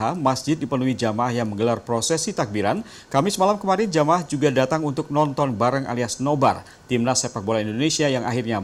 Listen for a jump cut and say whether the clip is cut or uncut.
uncut